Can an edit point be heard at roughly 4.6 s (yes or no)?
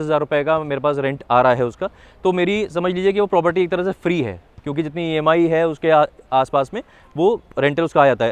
no